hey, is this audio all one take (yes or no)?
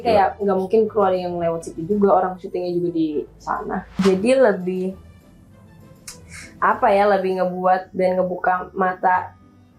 no